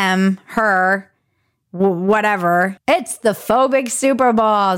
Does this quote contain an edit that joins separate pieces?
yes; 1 cut; at 2.8 s

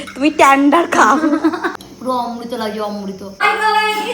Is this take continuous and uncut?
no; 2 cuts; at 1.8 s, 3.4 s

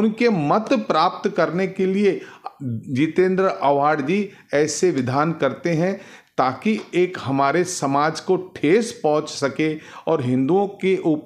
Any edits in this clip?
no; 0 cuts

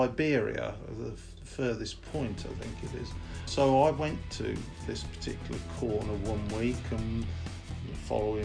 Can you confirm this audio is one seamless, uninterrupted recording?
no; 1 cut; at 3.5 s

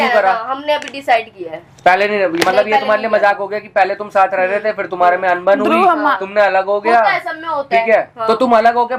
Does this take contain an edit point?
no; 0 cuts

